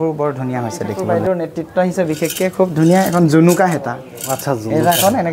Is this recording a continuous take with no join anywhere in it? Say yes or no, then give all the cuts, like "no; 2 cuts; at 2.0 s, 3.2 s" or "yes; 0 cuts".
no; 1 cut; at 0.9 s